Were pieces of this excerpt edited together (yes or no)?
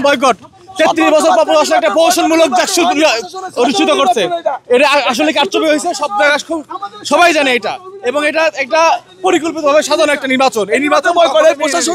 no